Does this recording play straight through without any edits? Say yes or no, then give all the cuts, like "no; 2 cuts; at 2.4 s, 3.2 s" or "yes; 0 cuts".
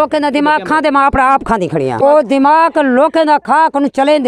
no; 1 cut; at 2.0 s